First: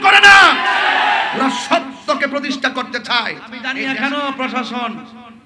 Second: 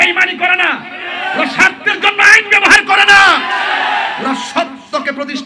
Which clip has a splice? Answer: first; 1 cut; at 3.7 s

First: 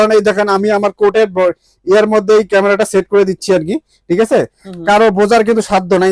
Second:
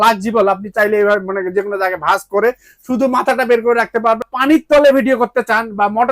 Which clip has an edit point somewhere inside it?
second; 1 cut; at 4.3 s

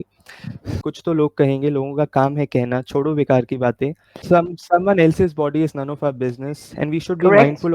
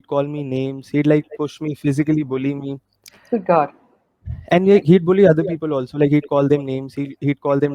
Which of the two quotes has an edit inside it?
first; 2 cuts; at 0.9 s, 4.2 s

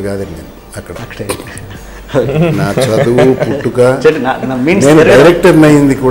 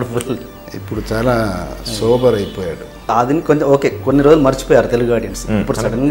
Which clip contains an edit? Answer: second; 1 cut; at 3.1 s

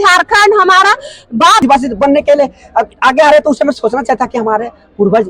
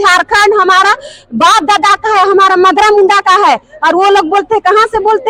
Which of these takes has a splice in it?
first; 1 cut; at 1.6 s

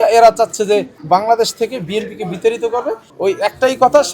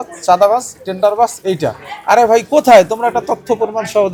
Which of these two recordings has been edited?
first; 2 cuts; at 0.9 s, 3.0 s

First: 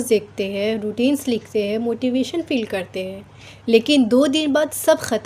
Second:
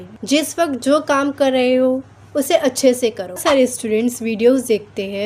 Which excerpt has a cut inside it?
second; 1 cut; at 3.4 s

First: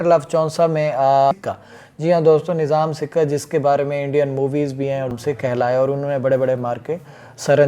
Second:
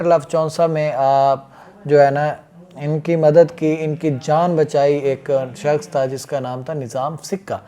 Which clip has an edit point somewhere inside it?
first; 2 cuts; at 1.3 s, 5.1 s

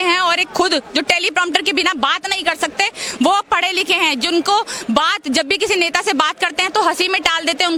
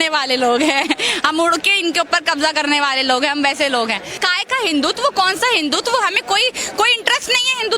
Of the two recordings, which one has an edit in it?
second; 1 cut; at 4.2 s

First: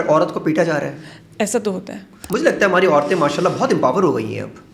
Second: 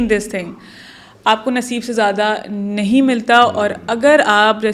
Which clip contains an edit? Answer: first; 1 cut; at 2.2 s

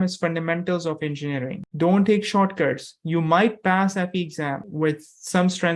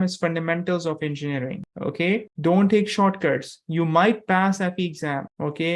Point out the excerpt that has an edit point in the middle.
first; 2 cuts; at 1.7 s, 4.7 s

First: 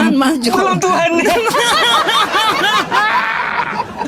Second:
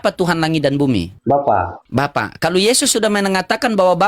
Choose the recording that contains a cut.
second; 2 cuts; at 1.1 s, 1.8 s

